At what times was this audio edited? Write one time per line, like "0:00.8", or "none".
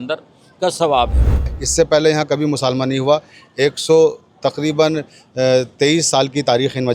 0:01.6